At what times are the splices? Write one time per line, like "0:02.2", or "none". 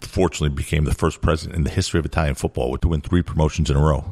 0:02.8